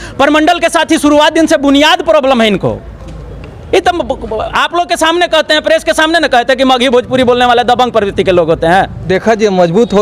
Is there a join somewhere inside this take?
yes; 1 cut; at 9.0 s

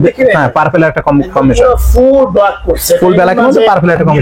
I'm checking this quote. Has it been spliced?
no; 0 cuts

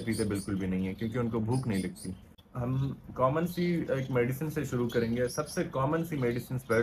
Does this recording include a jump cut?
yes; 1 cut; at 2.4 s

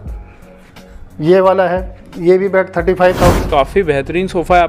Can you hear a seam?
yes; 1 cut; at 3.4 s

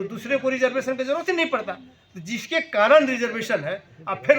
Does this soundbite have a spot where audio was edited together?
no; 0 cuts

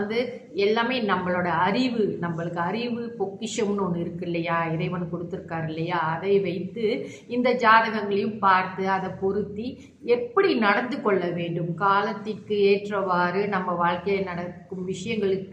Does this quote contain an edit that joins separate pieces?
no; 0 cuts

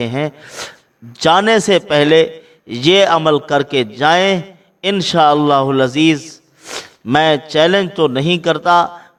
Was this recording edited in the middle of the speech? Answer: no; 0 cuts

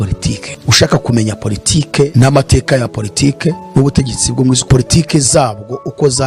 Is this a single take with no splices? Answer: yes; 0 cuts

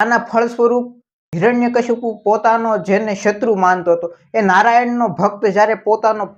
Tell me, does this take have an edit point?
no; 0 cuts

